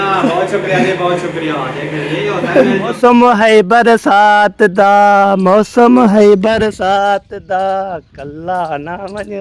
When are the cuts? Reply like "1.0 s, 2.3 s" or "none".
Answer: 2.9 s